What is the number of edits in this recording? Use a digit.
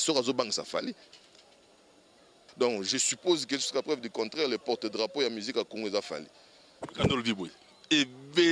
1